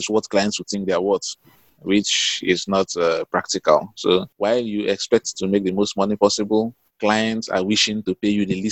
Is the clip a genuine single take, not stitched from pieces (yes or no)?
yes